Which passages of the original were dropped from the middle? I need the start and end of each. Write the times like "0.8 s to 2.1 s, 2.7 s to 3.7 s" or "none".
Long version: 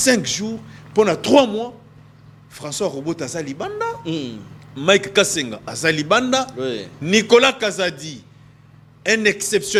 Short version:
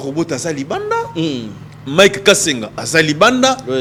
none